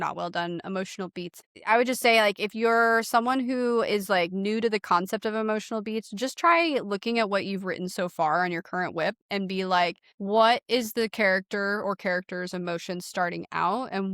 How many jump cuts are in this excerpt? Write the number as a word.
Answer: two